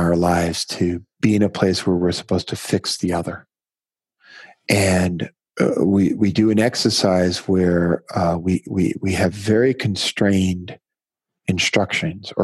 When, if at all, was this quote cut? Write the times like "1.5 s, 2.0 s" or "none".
1.1 s, 5.4 s